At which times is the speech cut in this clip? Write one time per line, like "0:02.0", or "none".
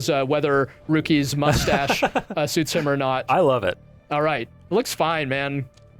0:03.2